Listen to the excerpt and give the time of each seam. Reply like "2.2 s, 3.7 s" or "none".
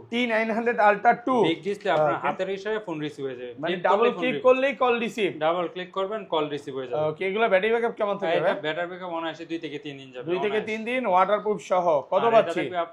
none

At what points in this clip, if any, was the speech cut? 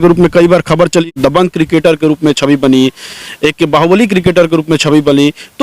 1.0 s

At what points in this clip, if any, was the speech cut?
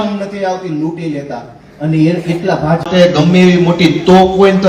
2.9 s

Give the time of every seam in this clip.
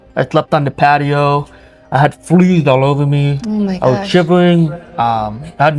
none

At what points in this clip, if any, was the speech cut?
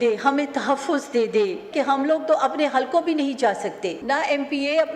1.7 s, 4.0 s

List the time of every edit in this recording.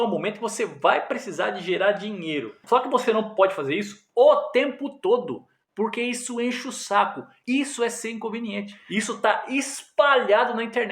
2.6 s, 7.3 s

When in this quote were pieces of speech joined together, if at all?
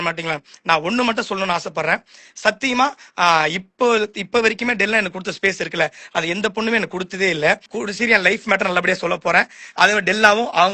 7.7 s

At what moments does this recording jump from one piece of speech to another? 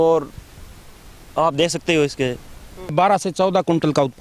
2.9 s

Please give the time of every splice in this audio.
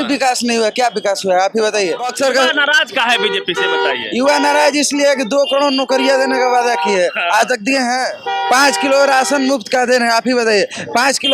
2.1 s, 8.2 s

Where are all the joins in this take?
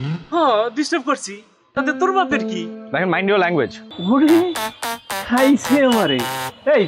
3.8 s

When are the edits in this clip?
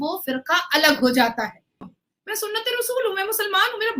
2.0 s

